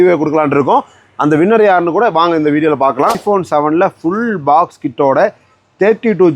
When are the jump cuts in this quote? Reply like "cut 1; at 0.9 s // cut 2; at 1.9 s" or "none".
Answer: cut 1; at 3.2 s